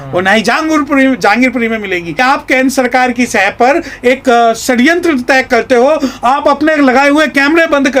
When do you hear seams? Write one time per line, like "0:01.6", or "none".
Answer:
0:02.2